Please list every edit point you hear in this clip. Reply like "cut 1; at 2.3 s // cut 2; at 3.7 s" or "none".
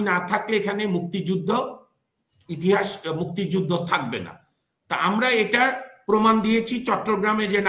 none